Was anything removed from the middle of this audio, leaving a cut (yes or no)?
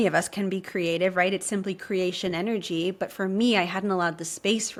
no